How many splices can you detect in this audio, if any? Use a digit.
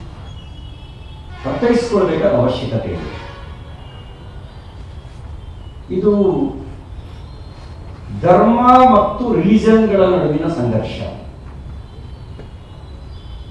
0